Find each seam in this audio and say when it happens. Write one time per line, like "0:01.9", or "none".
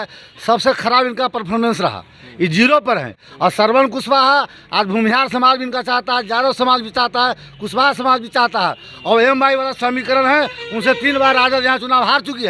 none